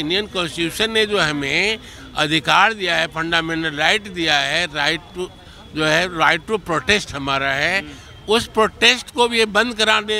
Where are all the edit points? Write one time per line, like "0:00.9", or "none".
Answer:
none

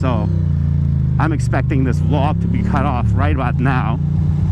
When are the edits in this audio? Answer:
none

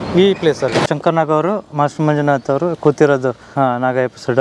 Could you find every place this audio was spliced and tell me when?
0:00.9
0:03.5

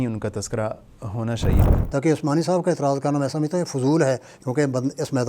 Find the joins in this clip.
0:01.7

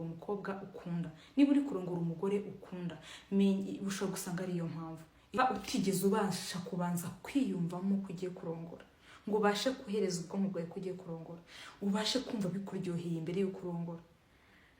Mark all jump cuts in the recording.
0:05.4

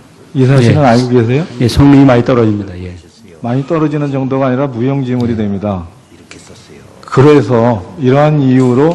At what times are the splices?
none

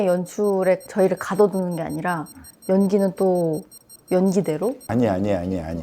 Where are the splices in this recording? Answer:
0:04.8

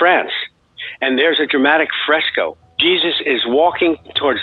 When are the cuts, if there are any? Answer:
0:01.5
0:02.7

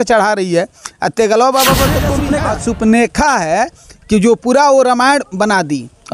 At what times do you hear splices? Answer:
0:02.2

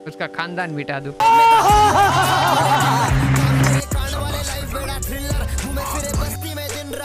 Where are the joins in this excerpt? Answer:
none

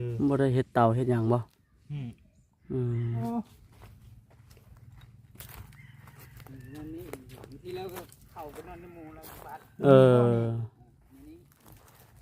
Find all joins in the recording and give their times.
0:03.2

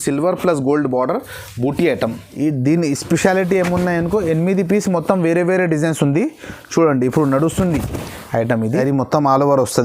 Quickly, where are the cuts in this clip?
0:02.2
0:08.6

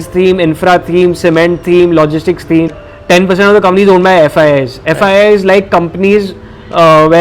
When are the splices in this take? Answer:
0:02.9

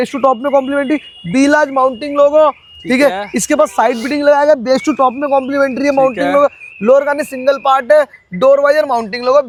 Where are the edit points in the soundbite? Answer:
none

